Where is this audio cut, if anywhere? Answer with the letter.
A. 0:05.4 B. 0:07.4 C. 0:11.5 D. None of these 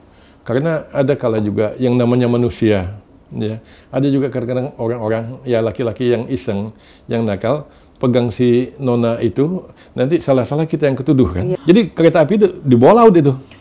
C